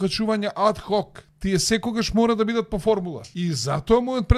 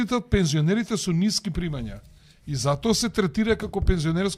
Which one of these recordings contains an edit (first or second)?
first